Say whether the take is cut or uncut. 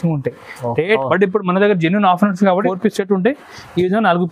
cut